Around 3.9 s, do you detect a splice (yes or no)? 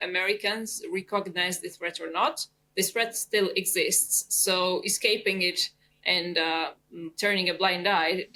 no